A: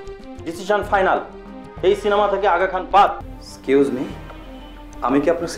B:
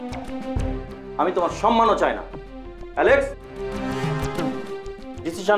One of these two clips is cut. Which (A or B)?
A